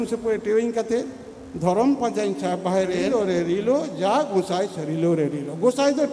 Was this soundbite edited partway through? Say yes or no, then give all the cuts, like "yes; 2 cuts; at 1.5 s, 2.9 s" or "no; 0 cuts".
yes; 1 cut; at 3.1 s